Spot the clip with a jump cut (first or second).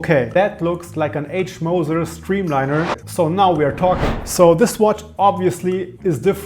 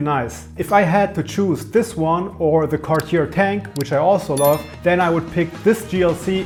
first